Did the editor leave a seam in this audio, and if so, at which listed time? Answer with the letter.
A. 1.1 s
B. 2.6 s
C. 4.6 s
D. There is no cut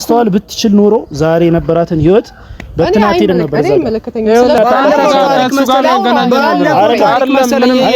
C